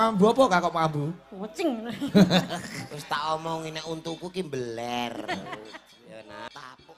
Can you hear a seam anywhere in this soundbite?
yes; 1 cut; at 5.9 s

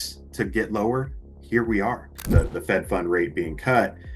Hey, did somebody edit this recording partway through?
yes; 1 cut; at 2.1 s

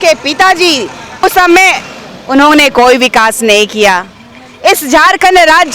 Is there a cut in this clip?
yes; 1 cut; at 1.2 s

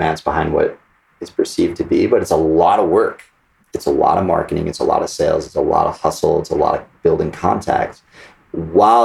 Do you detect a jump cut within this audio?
no; 0 cuts

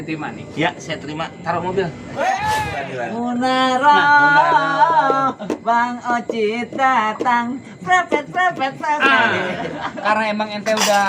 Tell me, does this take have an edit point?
yes; 1 cut; at 3.0 s

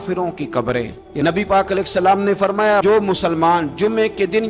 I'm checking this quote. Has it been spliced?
yes; 1 cut; at 1.0 s

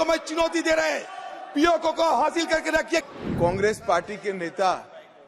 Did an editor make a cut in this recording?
yes; 1 cut; at 3.1 s

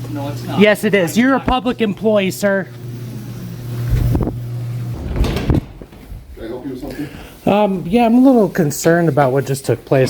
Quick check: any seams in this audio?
yes; 1 cut; at 4.9 s

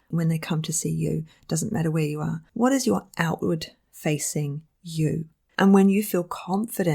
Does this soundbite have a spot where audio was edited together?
yes; 1 cut; at 5.4 s

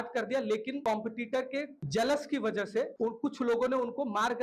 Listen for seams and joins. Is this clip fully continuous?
yes; 0 cuts

